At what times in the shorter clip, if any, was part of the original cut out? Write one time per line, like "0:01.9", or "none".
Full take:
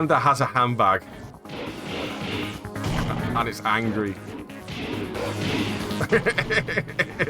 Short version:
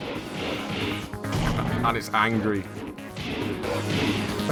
none